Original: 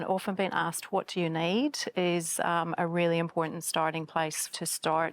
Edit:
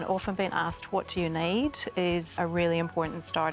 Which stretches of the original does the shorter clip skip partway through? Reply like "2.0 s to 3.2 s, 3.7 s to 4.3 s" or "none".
2.3 s to 2.7 s